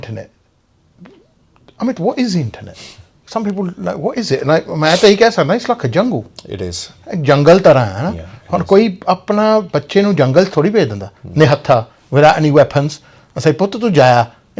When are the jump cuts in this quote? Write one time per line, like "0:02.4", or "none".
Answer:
none